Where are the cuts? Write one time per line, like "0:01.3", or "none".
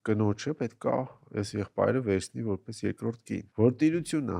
0:03.5